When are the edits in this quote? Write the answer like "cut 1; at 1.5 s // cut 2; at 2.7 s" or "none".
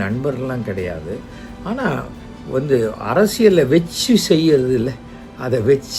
none